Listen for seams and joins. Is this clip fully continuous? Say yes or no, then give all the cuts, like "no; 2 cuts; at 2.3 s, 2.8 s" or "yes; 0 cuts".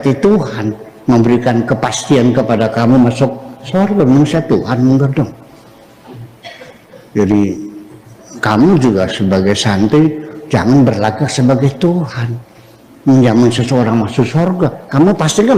yes; 0 cuts